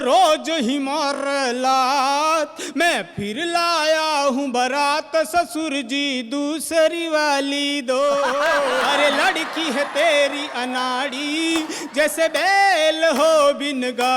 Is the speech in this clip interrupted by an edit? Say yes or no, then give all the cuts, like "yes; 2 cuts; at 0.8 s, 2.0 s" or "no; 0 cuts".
yes; 1 cut; at 8.9 s